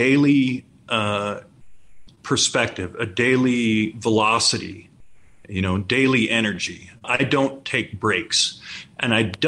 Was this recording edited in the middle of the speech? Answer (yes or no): yes